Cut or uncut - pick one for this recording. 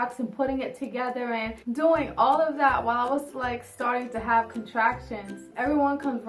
cut